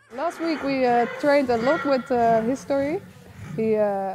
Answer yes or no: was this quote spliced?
no